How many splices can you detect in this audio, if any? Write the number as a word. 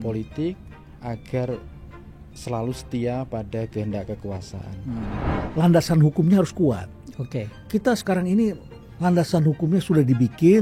one